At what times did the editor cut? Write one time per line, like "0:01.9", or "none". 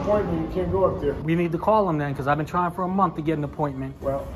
0:01.2